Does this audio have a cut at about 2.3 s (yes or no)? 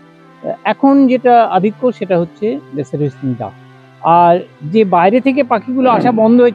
no